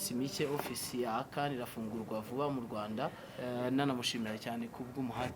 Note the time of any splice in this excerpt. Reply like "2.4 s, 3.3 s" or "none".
3.3 s